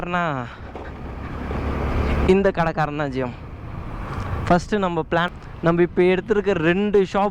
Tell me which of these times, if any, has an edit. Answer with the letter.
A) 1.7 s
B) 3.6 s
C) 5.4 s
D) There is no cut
C